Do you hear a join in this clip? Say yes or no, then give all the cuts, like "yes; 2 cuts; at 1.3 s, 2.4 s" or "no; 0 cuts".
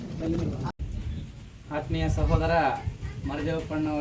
yes; 1 cut; at 0.9 s